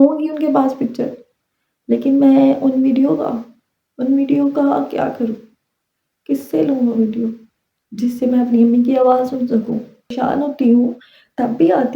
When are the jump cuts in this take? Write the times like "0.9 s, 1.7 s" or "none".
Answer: 10.1 s